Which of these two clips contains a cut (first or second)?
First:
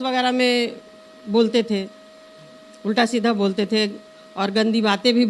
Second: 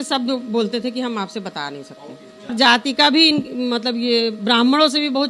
second